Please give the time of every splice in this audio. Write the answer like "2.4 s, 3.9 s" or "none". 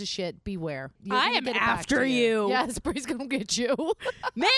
1.0 s